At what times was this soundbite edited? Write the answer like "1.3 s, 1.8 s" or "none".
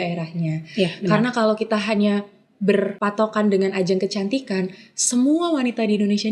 3.0 s